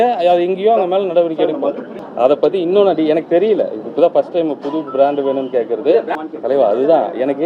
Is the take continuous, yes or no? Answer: no